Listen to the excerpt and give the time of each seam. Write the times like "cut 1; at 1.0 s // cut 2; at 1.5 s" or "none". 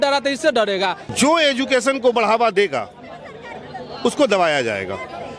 cut 1; at 1.0 s